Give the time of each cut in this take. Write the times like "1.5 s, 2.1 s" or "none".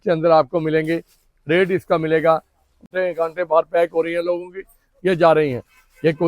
2.9 s